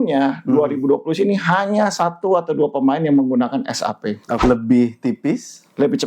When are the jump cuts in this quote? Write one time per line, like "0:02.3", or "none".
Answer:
0:04.3

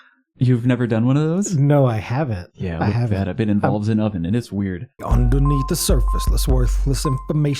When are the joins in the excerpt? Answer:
0:04.9

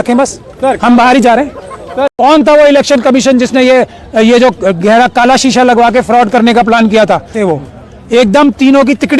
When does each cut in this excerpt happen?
0:02.1
0:07.4

